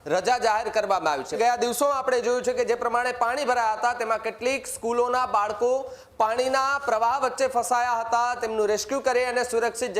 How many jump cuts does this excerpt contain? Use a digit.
1